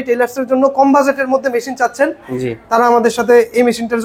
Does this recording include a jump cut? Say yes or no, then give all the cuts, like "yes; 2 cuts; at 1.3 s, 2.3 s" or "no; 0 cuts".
no; 0 cuts